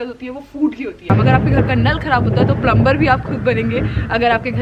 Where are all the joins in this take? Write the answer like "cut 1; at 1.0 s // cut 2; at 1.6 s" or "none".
cut 1; at 1.1 s

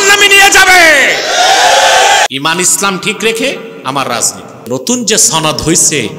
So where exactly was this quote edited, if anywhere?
cut 1; at 2.3 s // cut 2; at 4.7 s

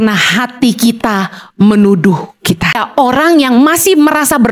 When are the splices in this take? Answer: cut 1; at 2.8 s

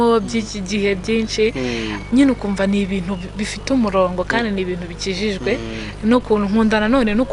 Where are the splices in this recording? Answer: none

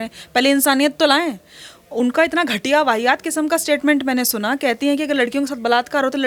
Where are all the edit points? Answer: none

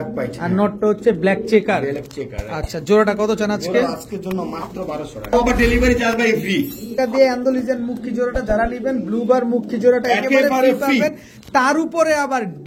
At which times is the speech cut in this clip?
cut 1; at 5.3 s // cut 2; at 7.0 s

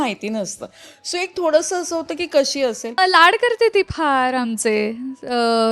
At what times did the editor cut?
cut 1; at 3.0 s

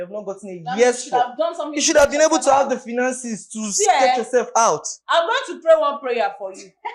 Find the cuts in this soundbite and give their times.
none

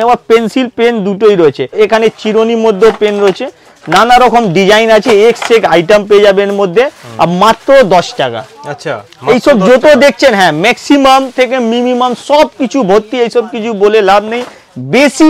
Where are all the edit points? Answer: none

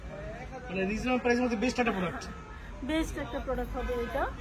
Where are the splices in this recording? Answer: none

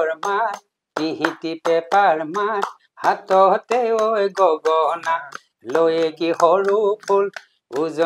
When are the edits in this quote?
none

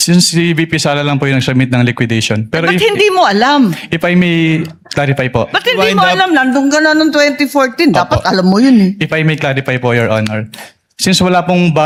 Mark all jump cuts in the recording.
none

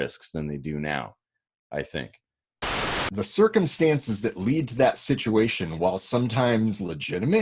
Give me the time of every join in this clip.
cut 1; at 2.7 s

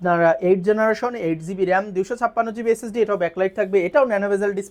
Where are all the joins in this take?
none

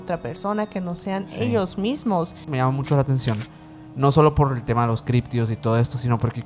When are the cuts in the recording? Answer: cut 1; at 2.5 s

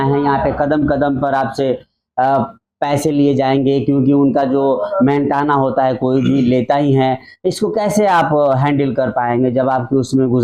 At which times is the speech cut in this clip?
none

